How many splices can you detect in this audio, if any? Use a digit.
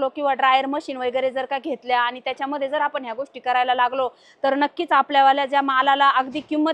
0